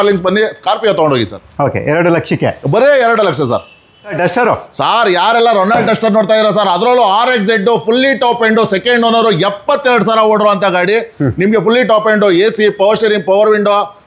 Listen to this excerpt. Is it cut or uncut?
uncut